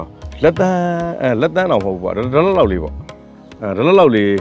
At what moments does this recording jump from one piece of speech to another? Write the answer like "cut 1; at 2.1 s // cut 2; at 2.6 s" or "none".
none